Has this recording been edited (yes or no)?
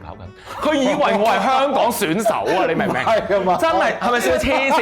no